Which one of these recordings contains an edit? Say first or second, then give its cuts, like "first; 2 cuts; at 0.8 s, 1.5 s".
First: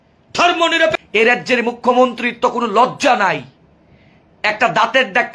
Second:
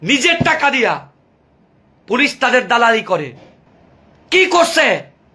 first; 1 cut; at 0.9 s